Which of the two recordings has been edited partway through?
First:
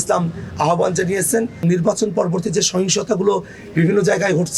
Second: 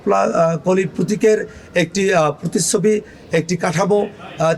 first; 1 cut; at 1.6 s

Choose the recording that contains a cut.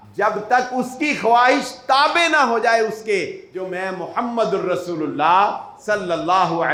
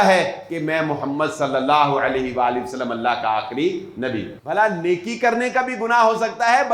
second; 1 cut; at 4.3 s

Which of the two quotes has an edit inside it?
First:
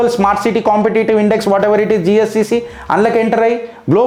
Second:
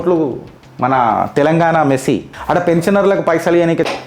second; 1 cut; at 2.3 s

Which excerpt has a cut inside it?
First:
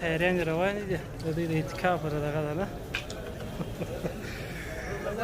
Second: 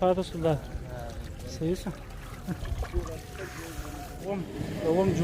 second; 1 cut; at 4.3 s

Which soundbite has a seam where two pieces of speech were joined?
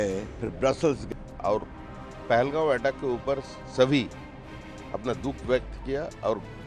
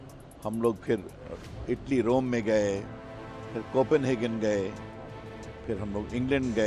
first; 1 cut; at 1.0 s

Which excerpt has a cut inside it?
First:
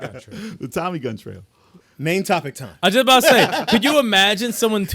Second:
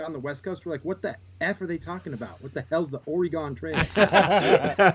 first; 1 cut; at 1.7 s

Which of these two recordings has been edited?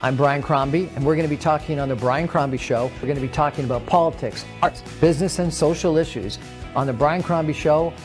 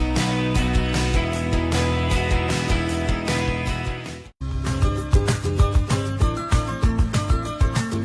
first; 1 cut; at 4.6 s

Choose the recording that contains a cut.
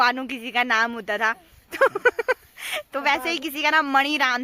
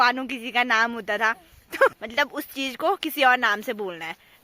second; 1 cut; at 2.0 s

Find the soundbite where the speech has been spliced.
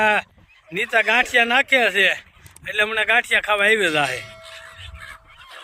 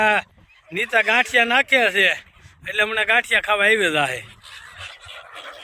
second; 1 cut; at 4.3 s

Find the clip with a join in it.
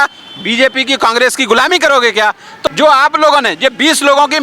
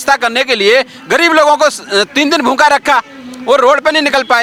first; 1 cut; at 2.5 s

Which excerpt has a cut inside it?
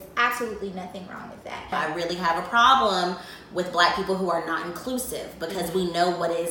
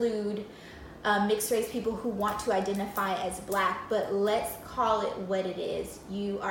first; 1 cut; at 1.7 s

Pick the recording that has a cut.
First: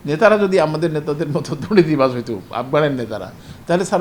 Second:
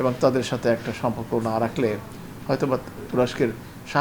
second; 1 cut; at 3.0 s

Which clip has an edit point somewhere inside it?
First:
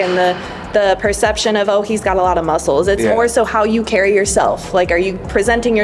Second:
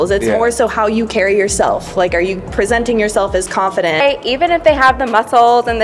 second; 1 cut; at 4.0 s

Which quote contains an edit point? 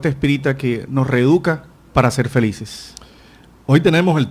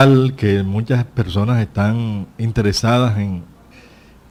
first; 1 cut; at 2.1 s

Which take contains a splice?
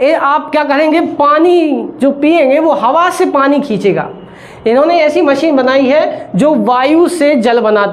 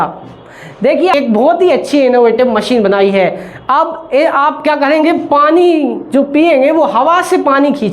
second; 1 cut; at 1.1 s

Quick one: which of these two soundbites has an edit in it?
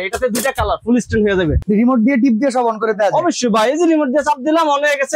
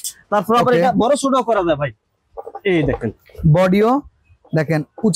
first; 1 cut; at 1.6 s

